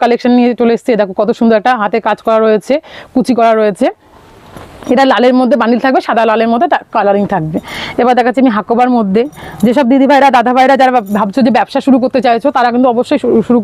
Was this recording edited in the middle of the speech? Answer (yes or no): no